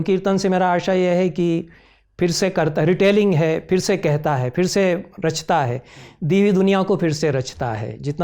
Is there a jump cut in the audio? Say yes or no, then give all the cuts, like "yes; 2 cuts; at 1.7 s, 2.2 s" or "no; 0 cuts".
no; 0 cuts